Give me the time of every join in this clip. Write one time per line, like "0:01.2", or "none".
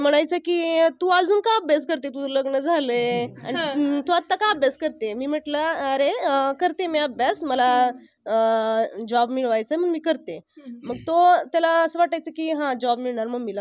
none